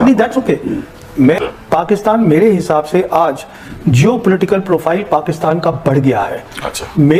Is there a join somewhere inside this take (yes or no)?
yes